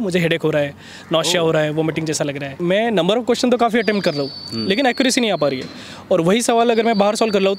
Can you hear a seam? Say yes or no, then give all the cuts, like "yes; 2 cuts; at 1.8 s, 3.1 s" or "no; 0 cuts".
yes; 1 cut; at 2.5 s